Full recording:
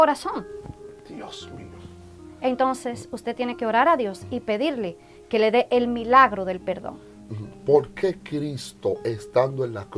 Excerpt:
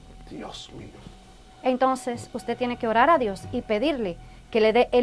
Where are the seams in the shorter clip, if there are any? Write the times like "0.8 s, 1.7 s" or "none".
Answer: none